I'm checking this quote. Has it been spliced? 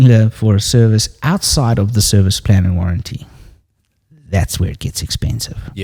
no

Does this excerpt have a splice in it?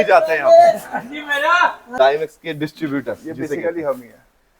yes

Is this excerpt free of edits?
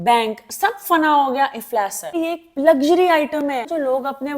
no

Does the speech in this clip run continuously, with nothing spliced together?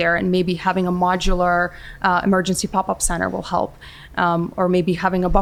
yes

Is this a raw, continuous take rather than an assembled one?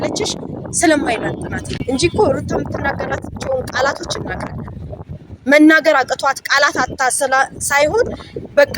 no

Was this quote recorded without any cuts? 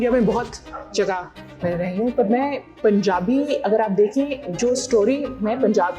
no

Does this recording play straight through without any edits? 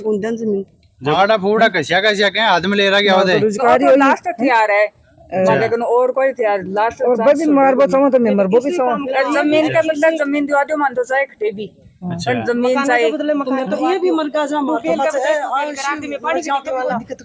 no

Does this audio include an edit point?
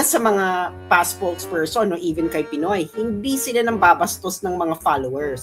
no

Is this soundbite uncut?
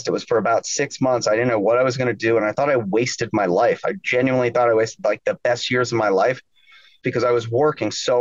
no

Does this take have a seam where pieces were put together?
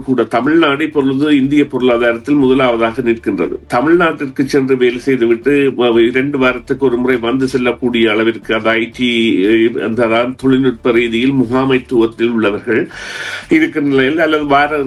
no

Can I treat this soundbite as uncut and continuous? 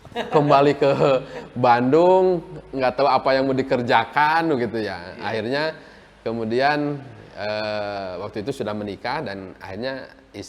yes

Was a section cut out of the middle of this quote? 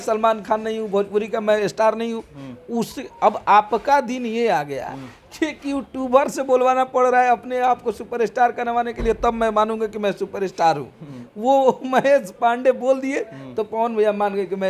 no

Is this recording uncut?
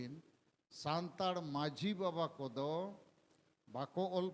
yes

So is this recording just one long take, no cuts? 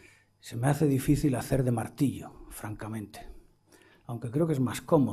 yes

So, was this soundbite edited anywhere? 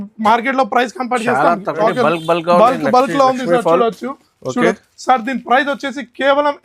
yes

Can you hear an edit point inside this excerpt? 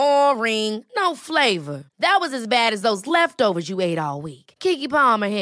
no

